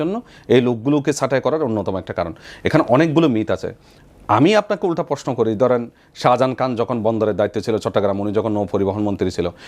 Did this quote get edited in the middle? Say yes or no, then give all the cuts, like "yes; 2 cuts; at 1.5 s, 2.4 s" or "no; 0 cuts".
no; 0 cuts